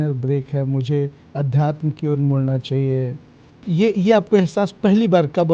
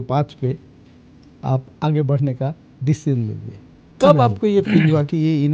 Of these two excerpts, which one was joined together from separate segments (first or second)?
second